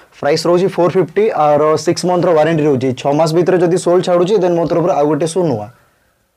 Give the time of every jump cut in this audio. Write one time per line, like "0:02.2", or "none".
none